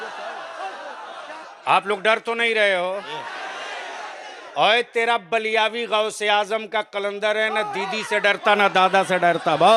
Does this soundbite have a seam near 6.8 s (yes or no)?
no